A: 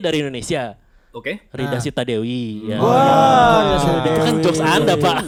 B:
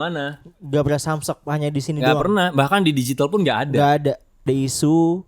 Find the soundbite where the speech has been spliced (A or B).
B